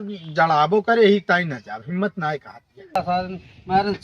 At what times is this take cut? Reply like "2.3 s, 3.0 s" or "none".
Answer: 3.0 s